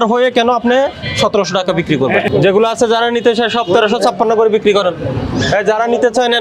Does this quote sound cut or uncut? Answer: cut